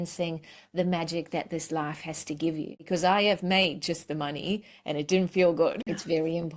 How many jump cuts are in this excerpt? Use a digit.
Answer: 2